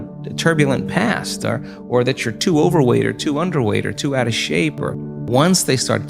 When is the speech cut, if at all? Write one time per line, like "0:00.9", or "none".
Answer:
0:05.1